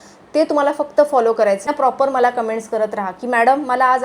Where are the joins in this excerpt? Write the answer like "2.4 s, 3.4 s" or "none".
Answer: 1.7 s